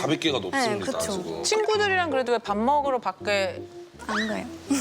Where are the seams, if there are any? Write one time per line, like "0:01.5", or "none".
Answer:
0:01.3